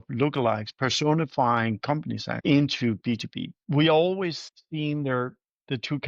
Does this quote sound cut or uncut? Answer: cut